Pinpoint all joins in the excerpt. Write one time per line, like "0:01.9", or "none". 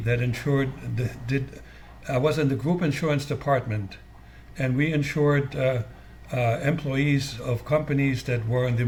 none